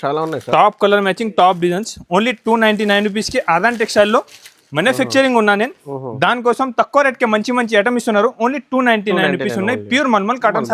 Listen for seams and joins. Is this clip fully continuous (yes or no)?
yes